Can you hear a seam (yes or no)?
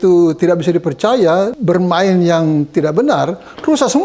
yes